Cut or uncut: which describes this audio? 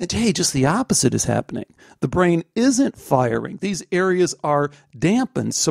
uncut